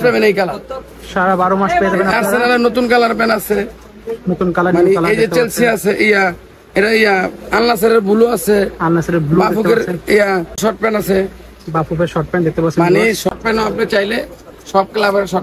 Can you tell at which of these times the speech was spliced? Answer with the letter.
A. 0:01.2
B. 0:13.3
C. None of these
B